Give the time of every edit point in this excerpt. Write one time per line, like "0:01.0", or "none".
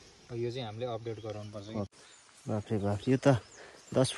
0:02.0